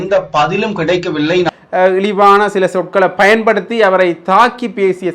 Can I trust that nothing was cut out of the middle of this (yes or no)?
no